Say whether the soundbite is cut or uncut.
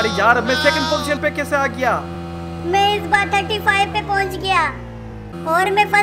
uncut